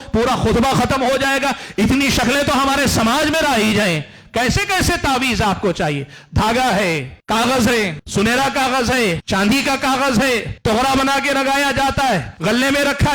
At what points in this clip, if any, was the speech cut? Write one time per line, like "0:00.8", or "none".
0:07.1
0:08.0
0:09.2
0:10.5
0:12.3